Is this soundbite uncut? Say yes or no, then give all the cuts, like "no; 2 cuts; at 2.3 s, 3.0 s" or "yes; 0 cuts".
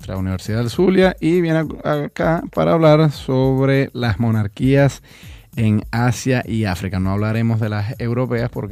yes; 0 cuts